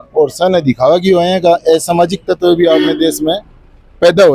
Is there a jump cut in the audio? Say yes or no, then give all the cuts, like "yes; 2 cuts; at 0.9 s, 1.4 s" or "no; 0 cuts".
no; 0 cuts